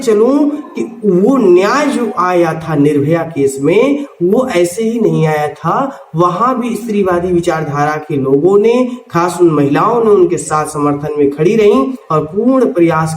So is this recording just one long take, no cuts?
yes; 0 cuts

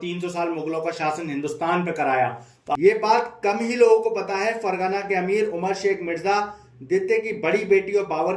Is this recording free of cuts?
no; 1 cut; at 2.8 s

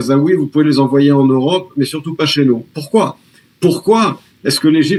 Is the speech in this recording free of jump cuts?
yes; 0 cuts

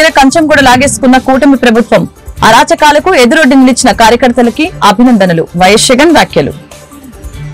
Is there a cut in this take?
no; 0 cuts

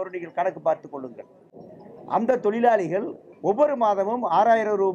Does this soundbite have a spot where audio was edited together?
no; 0 cuts

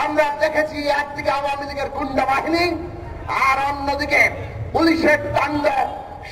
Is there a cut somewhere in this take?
no; 0 cuts

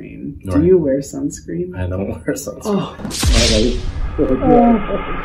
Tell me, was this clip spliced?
no; 0 cuts

